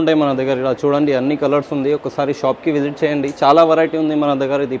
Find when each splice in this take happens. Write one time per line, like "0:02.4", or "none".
none